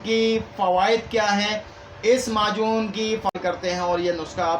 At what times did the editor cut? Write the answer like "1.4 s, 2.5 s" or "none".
3.3 s